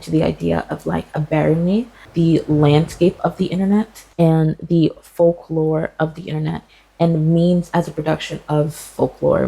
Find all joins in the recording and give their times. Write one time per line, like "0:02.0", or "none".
none